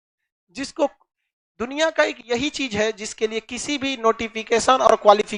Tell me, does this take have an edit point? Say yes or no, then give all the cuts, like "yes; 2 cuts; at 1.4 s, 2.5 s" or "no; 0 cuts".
no; 0 cuts